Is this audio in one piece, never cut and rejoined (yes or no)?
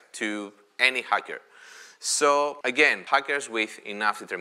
no